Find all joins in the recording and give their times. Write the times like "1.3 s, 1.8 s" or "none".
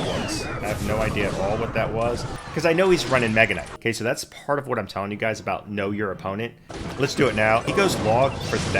2.3 s, 3.7 s, 6.6 s, 7.7 s